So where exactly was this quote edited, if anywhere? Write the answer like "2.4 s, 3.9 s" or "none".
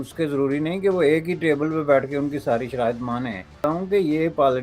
3.6 s